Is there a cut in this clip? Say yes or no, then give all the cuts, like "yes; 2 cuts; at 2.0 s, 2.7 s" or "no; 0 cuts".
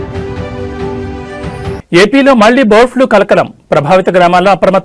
yes; 1 cut; at 1.7 s